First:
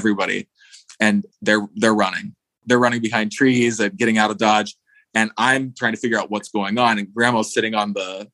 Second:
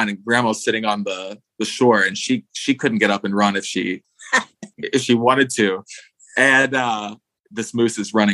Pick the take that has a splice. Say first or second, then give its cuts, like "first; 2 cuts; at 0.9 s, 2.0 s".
first; 1 cut; at 2.6 s